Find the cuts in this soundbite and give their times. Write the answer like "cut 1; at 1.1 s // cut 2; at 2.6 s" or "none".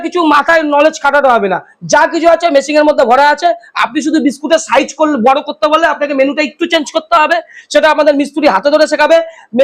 none